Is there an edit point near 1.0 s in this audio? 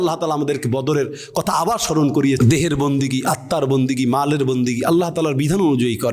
no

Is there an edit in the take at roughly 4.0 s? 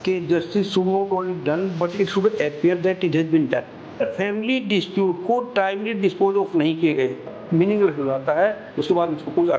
yes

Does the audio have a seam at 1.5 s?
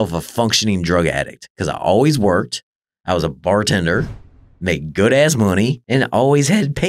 no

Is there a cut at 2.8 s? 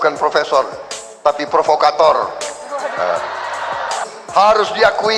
no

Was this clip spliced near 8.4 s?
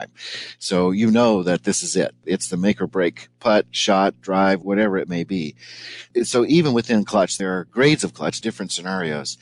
yes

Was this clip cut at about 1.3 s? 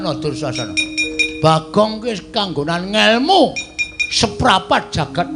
yes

